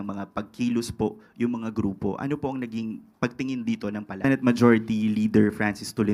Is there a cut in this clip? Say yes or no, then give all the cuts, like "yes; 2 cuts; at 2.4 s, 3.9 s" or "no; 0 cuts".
yes; 1 cut; at 4.2 s